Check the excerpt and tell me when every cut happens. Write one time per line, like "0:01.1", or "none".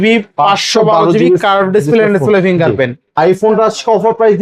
0:03.0